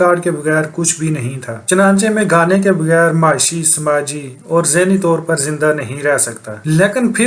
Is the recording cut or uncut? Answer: uncut